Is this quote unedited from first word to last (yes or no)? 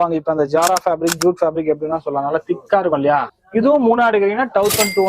no